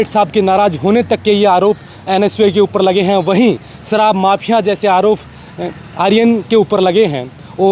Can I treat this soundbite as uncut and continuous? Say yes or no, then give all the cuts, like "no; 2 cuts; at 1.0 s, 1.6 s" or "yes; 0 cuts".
yes; 0 cuts